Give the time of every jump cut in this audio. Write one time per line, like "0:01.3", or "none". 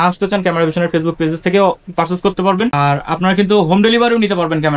0:02.7